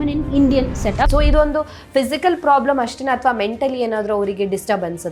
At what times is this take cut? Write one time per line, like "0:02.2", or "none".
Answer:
0:01.1